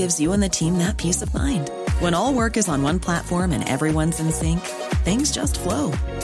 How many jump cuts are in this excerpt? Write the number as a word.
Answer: zero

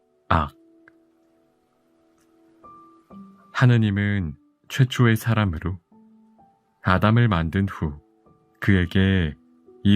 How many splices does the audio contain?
two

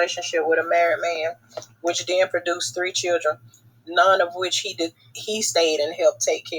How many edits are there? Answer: one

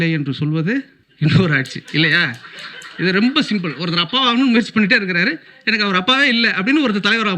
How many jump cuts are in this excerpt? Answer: one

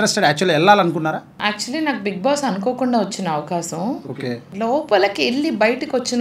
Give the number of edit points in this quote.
two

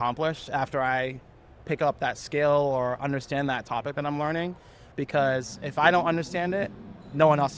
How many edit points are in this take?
zero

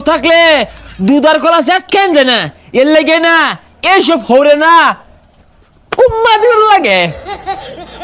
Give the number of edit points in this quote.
one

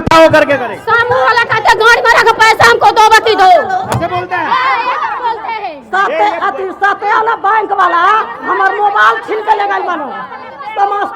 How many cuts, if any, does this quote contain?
zero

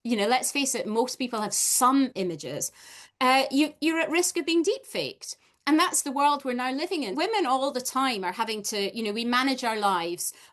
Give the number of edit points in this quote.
one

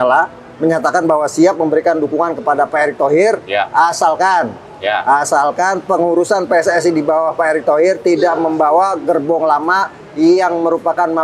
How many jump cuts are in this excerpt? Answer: zero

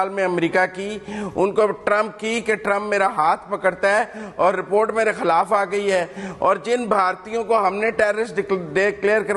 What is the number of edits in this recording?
zero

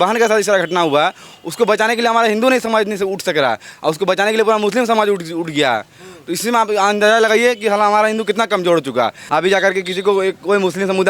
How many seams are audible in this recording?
one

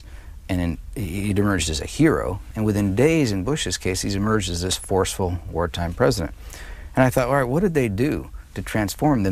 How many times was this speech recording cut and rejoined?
one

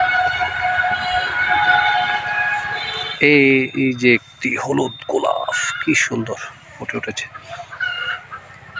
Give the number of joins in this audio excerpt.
one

